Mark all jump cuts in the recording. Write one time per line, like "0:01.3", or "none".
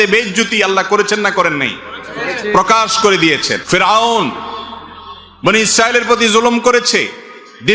0:03.5